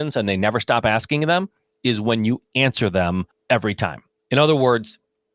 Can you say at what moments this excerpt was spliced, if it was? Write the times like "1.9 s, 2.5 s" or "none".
3.3 s